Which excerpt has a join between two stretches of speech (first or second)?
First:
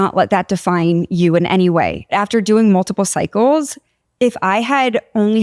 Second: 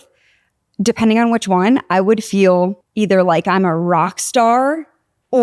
first